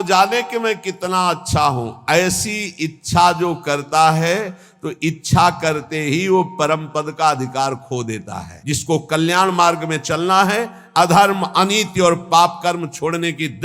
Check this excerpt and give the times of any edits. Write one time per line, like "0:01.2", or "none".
0:08.5